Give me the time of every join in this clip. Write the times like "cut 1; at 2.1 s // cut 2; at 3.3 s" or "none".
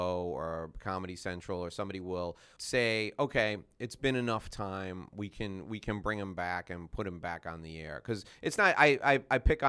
cut 1; at 2.5 s

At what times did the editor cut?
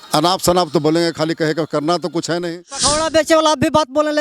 cut 1; at 2.9 s

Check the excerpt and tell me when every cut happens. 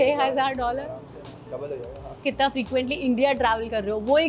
cut 1; at 2.2 s

